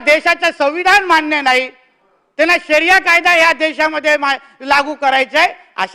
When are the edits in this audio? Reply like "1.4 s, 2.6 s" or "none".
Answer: none